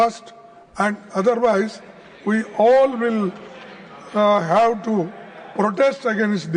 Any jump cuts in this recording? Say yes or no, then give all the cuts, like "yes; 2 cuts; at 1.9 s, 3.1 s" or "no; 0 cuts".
no; 0 cuts